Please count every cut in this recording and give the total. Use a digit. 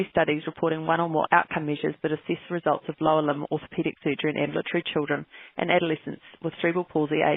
0